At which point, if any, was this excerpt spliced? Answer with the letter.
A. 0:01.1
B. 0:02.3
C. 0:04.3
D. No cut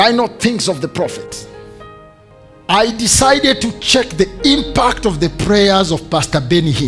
B